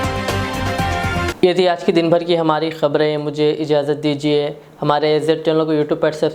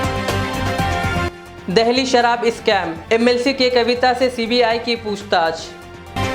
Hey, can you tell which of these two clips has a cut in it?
second; 1 cut; at 1.2 s

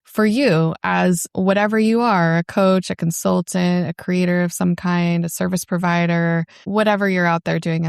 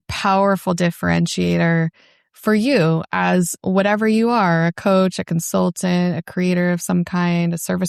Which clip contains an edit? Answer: first; 1 cut; at 6.6 s

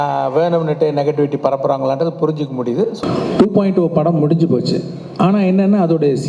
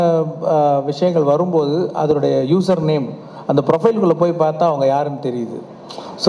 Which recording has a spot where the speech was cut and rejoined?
first; 1 cut; at 2.9 s

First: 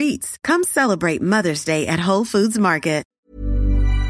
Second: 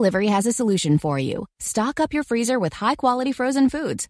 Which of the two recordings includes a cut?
first; 1 cut; at 3.1 s

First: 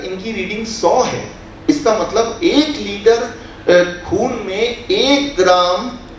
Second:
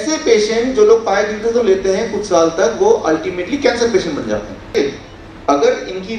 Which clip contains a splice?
second; 1 cut; at 4.7 s

